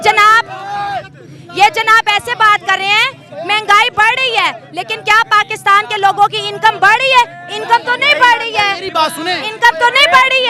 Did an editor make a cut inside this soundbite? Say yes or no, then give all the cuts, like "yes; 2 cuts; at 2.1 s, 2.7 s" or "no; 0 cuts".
no; 0 cuts